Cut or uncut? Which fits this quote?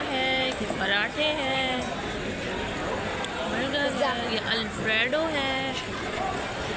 uncut